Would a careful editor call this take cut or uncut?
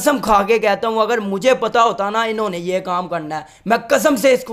uncut